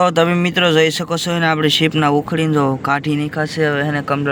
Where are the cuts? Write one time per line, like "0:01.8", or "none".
none